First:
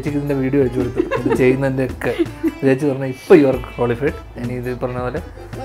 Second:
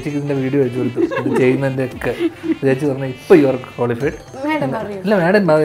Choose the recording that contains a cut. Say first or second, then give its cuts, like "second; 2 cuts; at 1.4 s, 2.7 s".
second; 1 cut; at 4.3 s